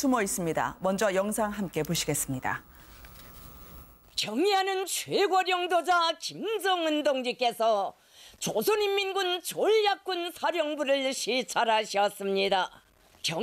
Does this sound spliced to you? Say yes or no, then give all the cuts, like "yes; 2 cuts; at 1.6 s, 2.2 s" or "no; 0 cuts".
no; 0 cuts